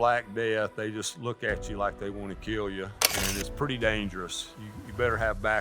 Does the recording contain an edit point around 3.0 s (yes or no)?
yes